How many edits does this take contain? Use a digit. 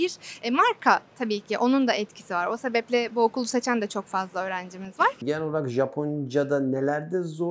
1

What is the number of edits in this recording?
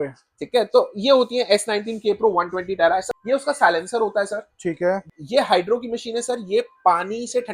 2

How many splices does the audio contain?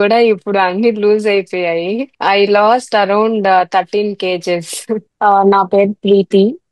2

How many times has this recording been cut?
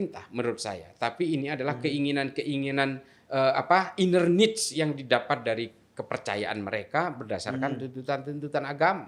0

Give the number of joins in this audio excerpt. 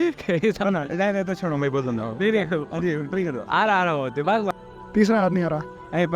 1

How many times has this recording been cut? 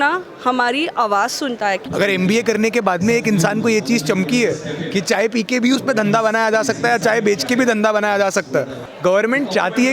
2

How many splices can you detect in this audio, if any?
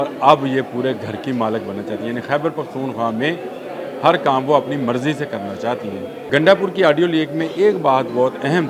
1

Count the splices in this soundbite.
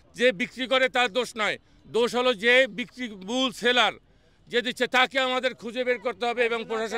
0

